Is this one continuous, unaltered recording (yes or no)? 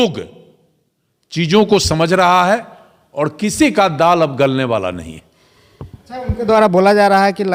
yes